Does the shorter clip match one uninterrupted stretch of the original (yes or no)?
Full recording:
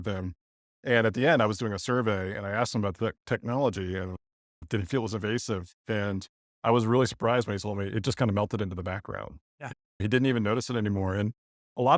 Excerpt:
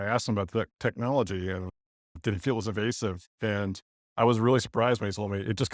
yes